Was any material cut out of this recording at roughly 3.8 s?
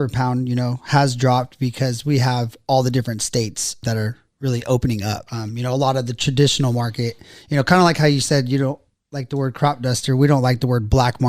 yes; 2 cuts; at 3.8 s, 5.3 s

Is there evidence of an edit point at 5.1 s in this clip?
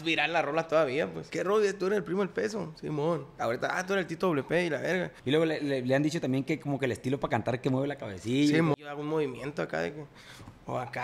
yes; 3 cuts; at 1.2 s, 5.1 s, 8.7 s

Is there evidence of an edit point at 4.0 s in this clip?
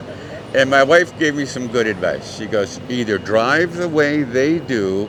no; 0 cuts

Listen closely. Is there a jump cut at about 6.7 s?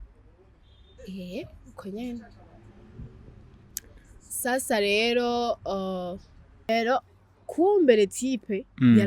yes; 1 cut; at 6.7 s

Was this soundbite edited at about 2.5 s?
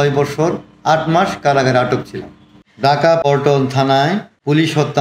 no; 0 cuts

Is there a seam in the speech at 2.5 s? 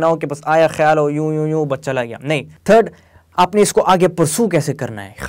yes; 1 cut; at 2.5 s

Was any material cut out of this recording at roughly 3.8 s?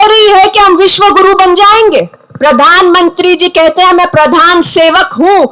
no; 1 cut; at 2.2 s

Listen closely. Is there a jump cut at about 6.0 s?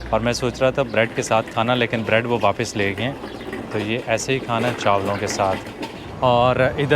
yes; 1 cut; at 6.0 s

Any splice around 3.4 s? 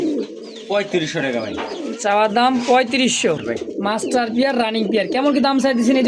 yes; 1 cut; at 3.4 s

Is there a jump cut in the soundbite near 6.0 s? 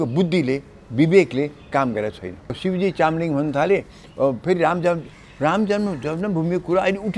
no; 1 cut; at 2.6 s

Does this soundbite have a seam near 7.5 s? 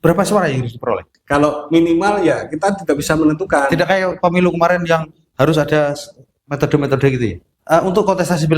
yes; 2 cuts; at 1.1 s, 7.5 s

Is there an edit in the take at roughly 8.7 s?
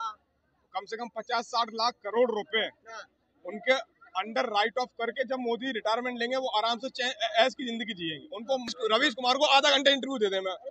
yes; 1 cut; at 8.7 s

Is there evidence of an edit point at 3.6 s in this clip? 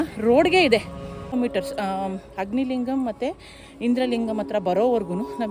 no; 1 cut; at 1.3 s

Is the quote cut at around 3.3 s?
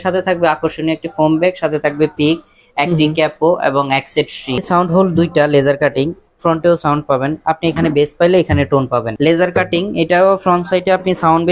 no; 2 cuts; at 4.6 s, 9.1 s

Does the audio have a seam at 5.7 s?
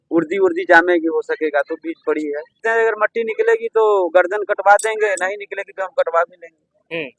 no; 1 cut; at 2.5 s

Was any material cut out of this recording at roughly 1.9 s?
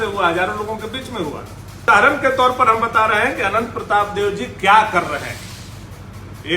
yes; 1 cut; at 1.9 s

